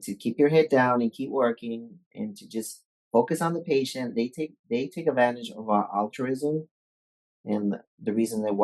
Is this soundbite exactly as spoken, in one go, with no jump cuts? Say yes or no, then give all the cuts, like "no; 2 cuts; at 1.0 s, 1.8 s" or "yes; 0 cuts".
yes; 0 cuts